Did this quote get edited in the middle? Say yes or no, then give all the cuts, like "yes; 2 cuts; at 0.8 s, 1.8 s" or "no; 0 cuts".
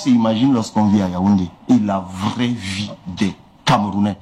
yes; 1 cut; at 1.5 s